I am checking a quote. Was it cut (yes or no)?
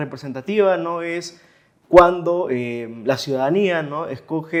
no